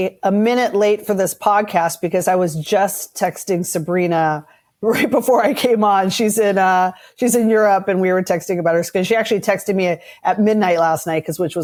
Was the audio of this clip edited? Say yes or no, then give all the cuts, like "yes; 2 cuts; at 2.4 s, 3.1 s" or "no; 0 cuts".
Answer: no; 0 cuts